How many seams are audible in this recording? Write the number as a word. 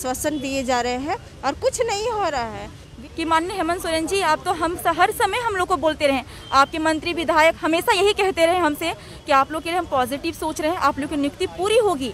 one